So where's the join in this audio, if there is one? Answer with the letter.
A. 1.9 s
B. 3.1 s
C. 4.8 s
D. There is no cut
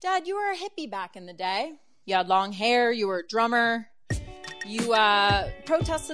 A